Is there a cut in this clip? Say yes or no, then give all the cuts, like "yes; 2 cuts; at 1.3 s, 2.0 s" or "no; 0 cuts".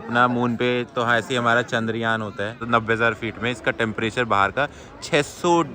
yes; 1 cut; at 2.7 s